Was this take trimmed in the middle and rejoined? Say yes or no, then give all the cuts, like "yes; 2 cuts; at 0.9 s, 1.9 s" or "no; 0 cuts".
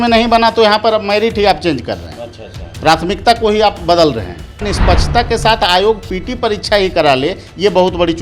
yes; 1 cut; at 4.7 s